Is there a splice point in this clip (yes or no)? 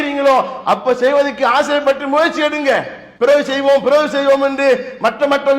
yes